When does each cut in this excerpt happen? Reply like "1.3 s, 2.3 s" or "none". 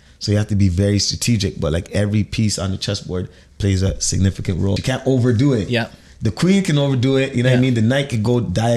4.8 s